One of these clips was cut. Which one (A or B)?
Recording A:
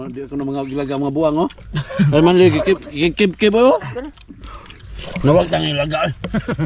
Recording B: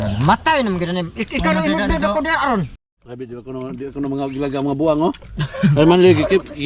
B